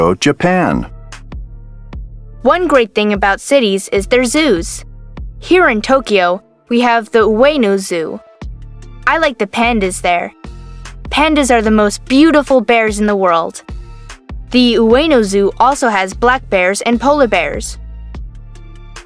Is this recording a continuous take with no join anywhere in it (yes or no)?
no